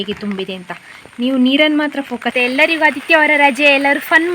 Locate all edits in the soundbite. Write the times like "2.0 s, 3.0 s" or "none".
2.3 s